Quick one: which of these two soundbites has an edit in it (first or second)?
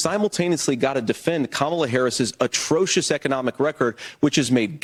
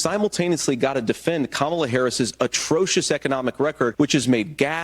second